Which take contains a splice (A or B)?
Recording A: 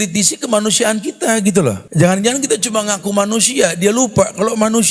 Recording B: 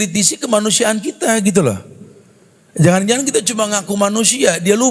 A